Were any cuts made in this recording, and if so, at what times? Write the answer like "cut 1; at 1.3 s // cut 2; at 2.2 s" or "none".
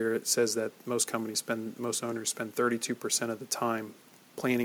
none